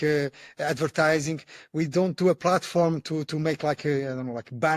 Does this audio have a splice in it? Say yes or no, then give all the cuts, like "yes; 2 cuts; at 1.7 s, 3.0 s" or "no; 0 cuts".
no; 0 cuts